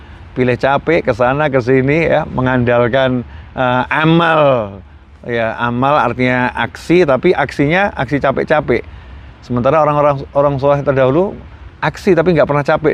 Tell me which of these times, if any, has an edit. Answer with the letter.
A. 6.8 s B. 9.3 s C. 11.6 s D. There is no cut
D